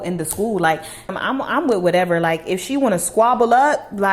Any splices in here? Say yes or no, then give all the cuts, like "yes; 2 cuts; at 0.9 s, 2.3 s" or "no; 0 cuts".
yes; 1 cut; at 1.1 s